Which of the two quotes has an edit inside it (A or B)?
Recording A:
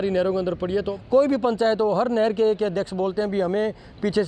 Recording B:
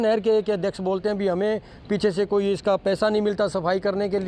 A